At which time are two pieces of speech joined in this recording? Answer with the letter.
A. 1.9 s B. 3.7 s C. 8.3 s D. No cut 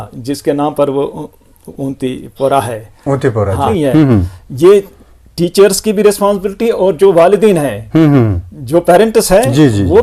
B